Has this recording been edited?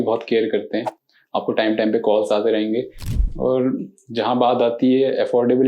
yes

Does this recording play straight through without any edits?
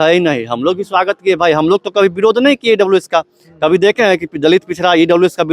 yes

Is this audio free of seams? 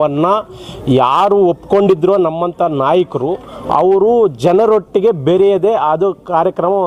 yes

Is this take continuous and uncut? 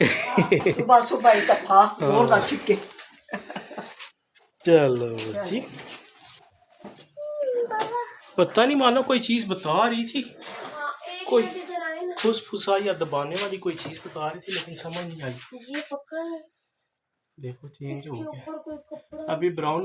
yes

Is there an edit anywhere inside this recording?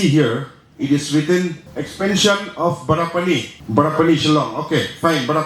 yes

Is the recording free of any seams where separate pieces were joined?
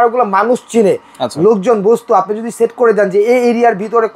yes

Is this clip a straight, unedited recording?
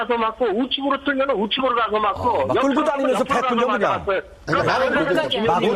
yes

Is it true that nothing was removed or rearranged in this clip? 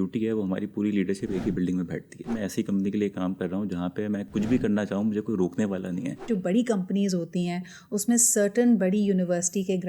no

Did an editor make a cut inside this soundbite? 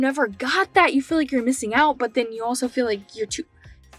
no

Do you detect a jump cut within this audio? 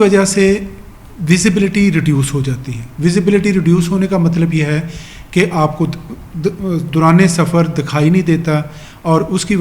no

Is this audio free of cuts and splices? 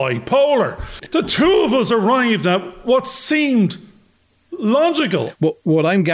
no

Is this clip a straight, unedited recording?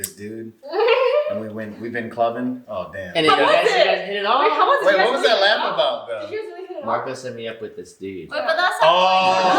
yes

